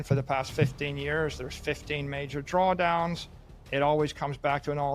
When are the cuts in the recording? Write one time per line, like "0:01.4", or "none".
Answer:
none